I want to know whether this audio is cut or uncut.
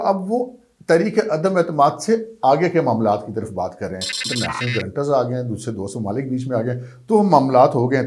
cut